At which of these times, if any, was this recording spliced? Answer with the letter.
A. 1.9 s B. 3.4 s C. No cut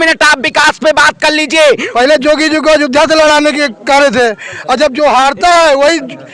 A